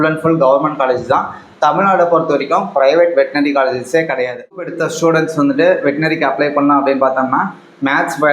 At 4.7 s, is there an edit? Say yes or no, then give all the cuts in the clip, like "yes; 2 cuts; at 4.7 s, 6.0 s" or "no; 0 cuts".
yes; 1 cut; at 4.7 s